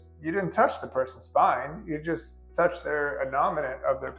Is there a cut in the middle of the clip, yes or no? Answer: no